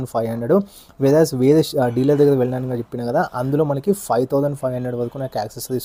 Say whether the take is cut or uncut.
uncut